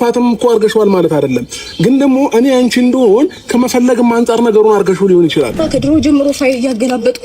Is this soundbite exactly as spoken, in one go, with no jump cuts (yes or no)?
no